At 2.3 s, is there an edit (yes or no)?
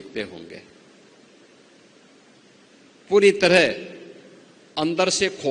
no